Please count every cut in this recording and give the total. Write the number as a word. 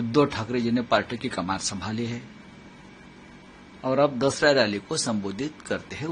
zero